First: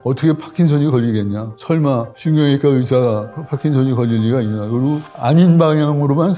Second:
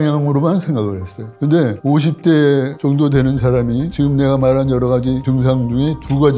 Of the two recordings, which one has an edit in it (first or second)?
second